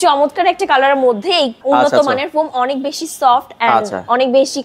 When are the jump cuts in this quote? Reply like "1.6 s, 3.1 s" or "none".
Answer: 1.6 s